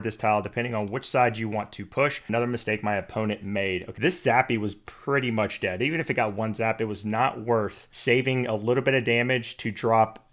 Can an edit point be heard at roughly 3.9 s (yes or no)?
yes